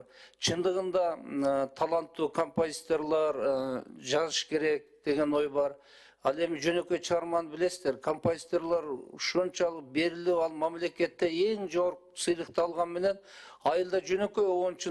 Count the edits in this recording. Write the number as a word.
zero